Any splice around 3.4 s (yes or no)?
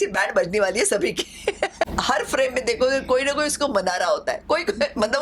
no